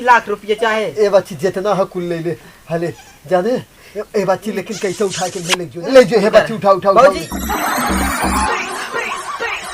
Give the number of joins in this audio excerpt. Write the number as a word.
one